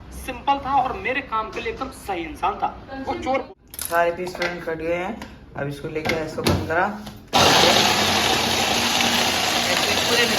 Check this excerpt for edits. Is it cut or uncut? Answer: cut